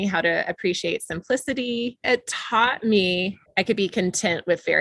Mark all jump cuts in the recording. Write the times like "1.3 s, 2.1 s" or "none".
2.0 s, 3.4 s